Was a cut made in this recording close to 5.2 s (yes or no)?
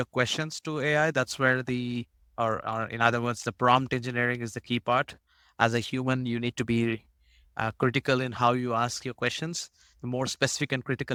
no